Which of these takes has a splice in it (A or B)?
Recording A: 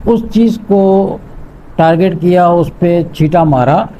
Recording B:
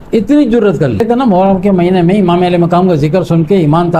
B